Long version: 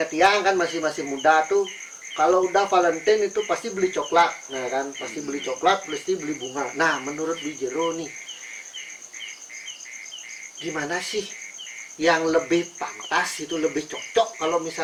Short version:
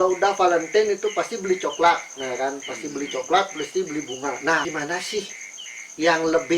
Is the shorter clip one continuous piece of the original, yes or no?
no